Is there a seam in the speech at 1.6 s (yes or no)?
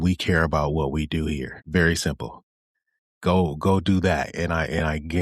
yes